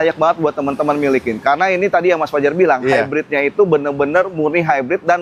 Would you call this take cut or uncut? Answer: uncut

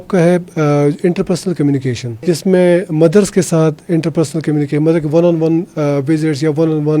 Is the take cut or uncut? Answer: cut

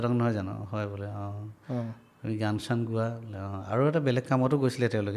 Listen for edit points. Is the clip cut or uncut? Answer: uncut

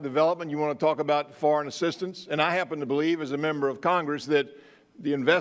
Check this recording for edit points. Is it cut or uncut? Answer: uncut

